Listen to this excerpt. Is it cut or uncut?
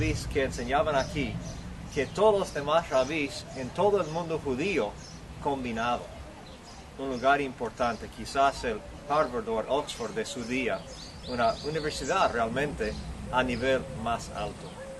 cut